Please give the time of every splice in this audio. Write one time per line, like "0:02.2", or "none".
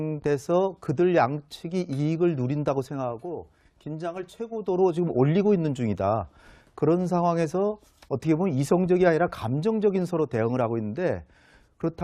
0:01.3